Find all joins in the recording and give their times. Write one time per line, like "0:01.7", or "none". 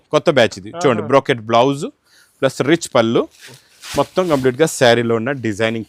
none